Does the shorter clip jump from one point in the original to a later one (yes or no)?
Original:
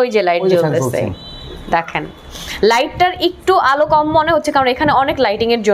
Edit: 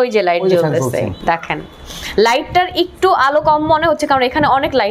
yes